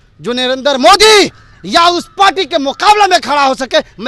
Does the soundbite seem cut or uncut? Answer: uncut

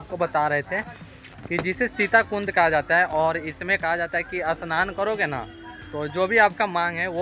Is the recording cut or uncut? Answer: uncut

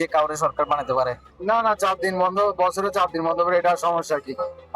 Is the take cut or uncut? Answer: cut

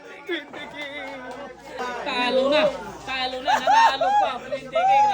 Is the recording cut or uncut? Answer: cut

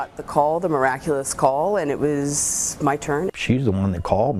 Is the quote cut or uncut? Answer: uncut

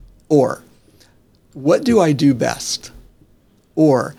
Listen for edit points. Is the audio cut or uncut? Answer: uncut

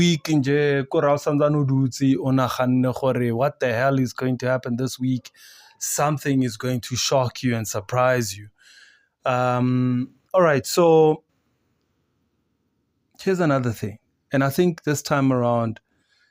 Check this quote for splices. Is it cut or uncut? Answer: uncut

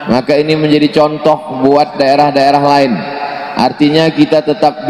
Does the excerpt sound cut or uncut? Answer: cut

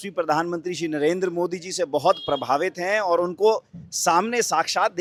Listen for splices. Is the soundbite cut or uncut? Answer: uncut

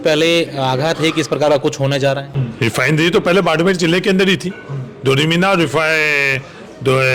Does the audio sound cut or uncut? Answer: cut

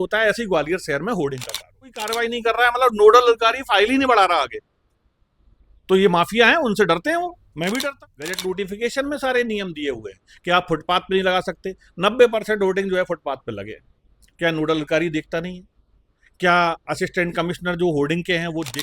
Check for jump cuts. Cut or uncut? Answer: cut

